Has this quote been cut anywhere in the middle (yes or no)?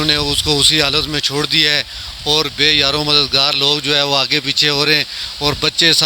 no